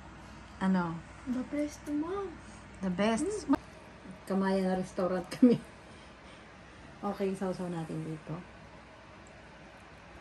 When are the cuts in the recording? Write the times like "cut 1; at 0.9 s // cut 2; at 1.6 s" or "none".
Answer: cut 1; at 3.5 s